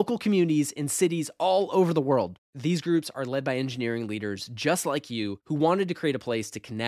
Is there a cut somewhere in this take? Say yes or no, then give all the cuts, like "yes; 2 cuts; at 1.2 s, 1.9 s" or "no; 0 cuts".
no; 0 cuts